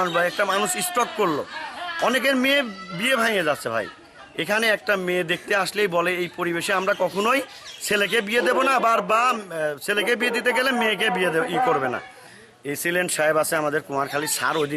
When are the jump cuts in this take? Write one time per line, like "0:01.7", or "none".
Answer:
0:12.2

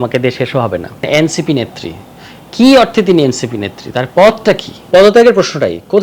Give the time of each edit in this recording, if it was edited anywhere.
0:01.1
0:04.7

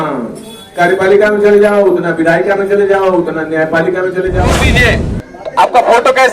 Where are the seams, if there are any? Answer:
0:04.6

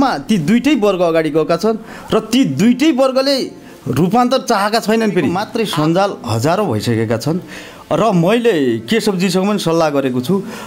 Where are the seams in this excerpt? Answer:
0:05.4

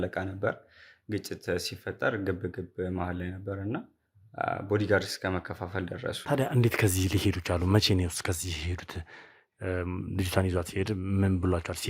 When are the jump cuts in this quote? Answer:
0:06.2

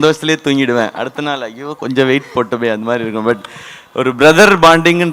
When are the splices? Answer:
none

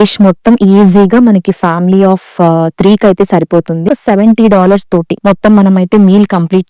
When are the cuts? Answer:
0:03.9

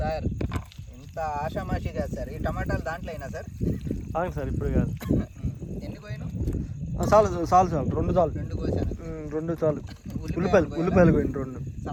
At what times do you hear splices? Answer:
none

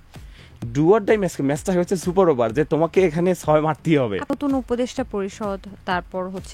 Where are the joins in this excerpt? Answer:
0:04.4

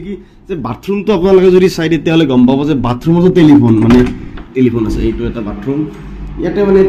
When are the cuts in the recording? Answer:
none

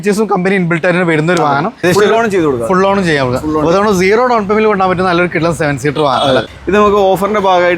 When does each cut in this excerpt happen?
0:01.8
0:06.5

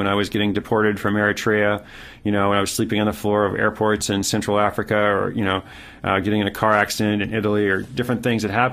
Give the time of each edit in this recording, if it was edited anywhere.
none

